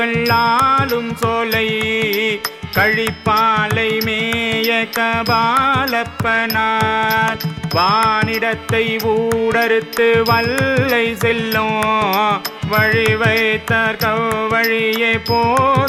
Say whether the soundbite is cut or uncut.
uncut